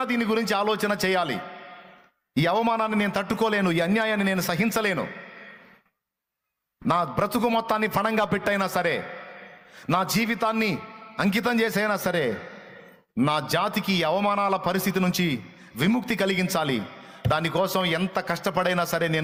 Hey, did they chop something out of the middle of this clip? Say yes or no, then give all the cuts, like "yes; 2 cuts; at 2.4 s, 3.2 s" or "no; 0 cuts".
no; 0 cuts